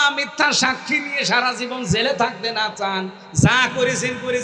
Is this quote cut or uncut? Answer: uncut